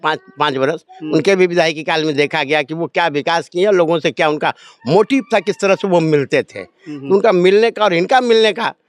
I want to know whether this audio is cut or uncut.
uncut